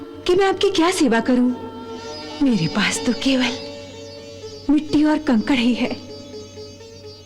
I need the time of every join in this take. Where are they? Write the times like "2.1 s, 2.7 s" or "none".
none